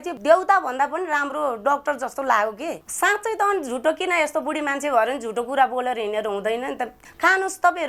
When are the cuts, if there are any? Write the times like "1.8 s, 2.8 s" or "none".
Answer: 2.7 s, 6.9 s